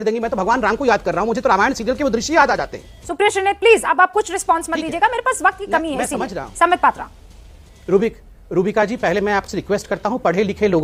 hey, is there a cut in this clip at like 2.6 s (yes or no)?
no